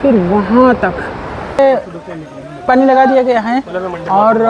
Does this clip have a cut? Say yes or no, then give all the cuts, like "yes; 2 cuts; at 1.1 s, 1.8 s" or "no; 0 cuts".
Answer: yes; 1 cut; at 1.6 s